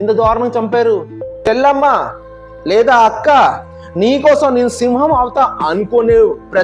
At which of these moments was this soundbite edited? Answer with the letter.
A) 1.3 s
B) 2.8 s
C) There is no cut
A